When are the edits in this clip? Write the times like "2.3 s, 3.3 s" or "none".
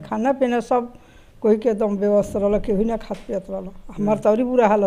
none